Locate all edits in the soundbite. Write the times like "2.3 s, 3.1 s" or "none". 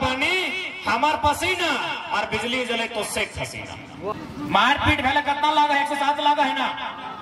4.1 s